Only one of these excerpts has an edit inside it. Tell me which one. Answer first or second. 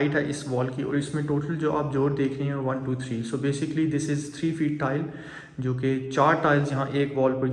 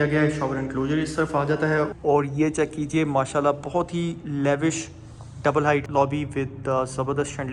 second